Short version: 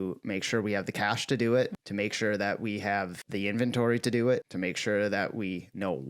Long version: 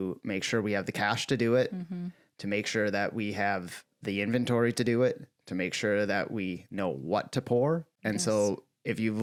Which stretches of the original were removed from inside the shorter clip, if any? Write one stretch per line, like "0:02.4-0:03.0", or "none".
0:01.8-0:02.3
0:03.7-0:03.9
0:05.2-0:05.5